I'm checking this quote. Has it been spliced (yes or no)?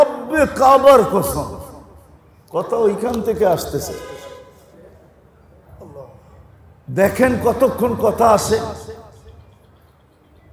no